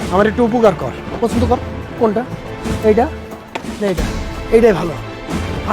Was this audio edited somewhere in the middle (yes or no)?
yes